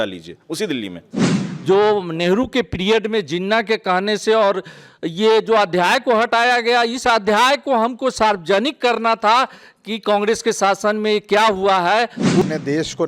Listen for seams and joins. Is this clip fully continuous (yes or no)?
no